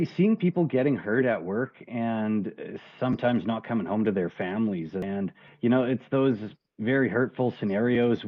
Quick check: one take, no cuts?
no; 1 cut; at 5.2 s

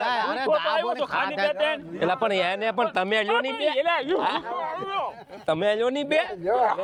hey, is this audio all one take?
yes; 0 cuts

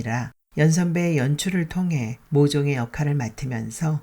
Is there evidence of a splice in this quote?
yes; 1 cut; at 2.2 s

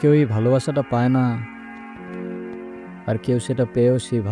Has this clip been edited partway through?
no; 0 cuts

